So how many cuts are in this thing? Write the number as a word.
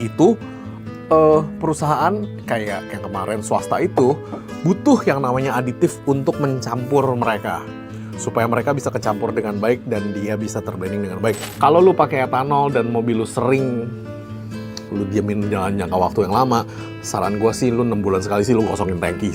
one